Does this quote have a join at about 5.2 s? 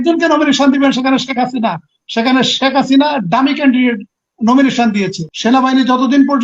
yes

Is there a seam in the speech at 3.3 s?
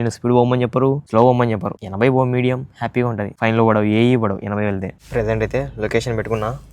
yes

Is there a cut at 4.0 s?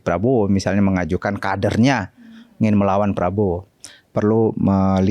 yes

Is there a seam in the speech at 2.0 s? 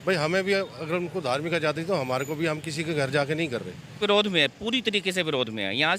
no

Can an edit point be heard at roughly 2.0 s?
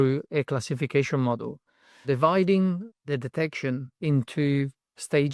yes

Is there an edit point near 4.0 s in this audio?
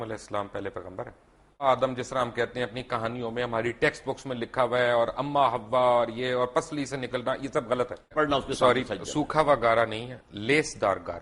no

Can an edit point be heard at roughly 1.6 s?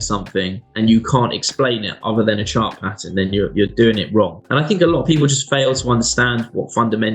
no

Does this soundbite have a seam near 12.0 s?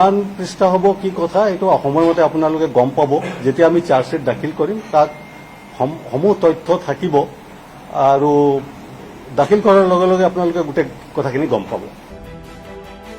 yes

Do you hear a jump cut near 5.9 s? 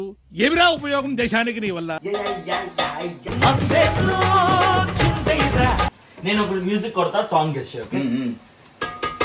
no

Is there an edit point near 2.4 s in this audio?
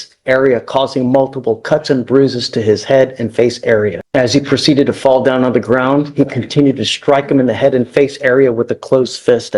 no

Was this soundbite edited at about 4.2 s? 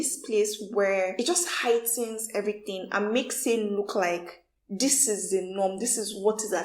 no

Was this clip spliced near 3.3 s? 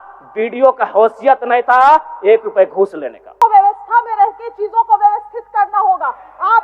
yes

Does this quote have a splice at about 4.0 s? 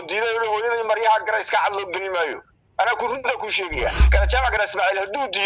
yes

